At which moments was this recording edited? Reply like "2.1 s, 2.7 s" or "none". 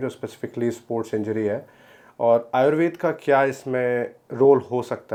none